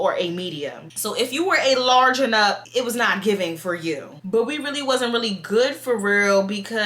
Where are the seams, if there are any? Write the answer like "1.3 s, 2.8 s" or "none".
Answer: 2.6 s, 4.2 s